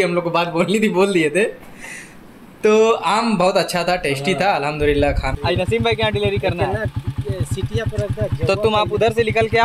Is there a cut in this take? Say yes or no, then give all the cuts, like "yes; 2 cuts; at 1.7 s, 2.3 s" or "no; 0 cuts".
yes; 1 cut; at 5.3 s